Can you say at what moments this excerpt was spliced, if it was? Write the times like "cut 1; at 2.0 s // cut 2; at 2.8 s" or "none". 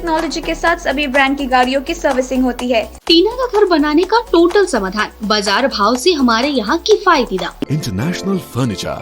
cut 1; at 3.0 s // cut 2; at 7.7 s